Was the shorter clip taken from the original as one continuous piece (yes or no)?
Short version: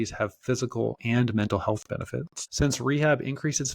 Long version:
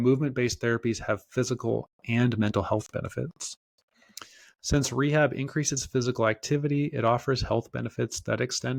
no